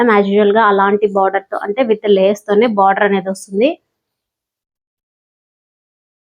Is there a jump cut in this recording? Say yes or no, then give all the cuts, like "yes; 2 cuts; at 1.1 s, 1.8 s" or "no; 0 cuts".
no; 0 cuts